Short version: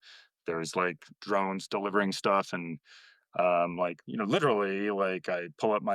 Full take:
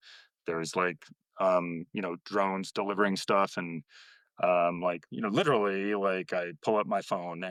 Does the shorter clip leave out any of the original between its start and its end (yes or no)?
yes